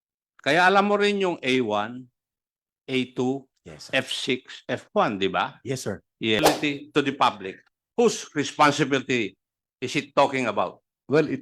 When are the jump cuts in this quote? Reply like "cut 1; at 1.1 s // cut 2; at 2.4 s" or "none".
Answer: cut 1; at 6.4 s